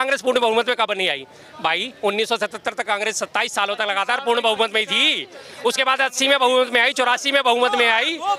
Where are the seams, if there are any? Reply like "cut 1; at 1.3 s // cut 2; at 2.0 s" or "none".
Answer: none